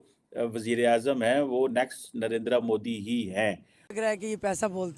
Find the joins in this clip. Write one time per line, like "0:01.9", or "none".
0:03.9